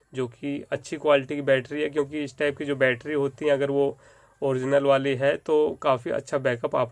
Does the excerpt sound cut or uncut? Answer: uncut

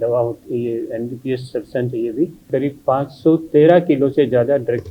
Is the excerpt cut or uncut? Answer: cut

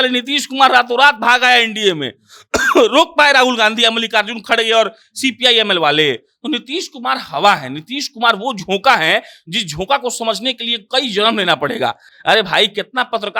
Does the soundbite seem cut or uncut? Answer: uncut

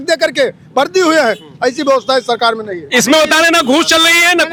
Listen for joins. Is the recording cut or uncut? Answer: uncut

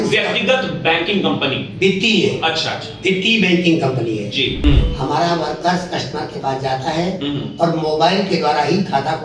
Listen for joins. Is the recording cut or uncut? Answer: cut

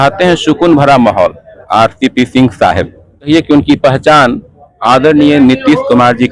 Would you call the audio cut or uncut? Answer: cut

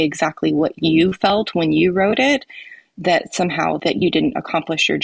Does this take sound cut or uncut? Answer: cut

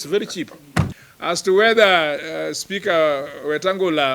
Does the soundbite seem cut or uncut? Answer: cut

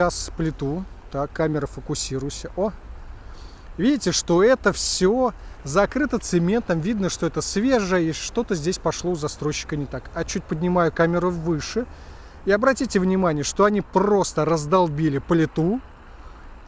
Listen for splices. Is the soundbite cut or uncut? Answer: uncut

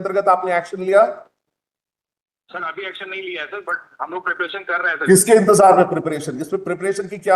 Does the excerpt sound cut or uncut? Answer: uncut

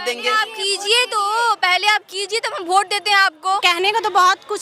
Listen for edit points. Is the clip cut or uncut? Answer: cut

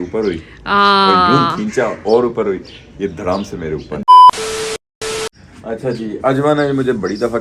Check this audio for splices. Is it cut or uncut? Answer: uncut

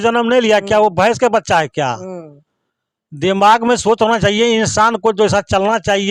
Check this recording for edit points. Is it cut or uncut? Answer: uncut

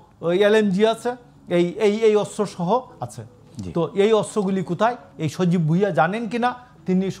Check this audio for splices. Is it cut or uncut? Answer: uncut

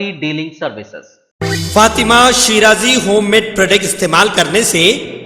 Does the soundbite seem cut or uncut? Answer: cut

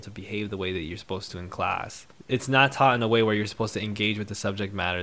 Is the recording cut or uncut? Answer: uncut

